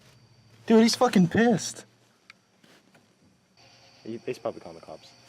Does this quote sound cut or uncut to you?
cut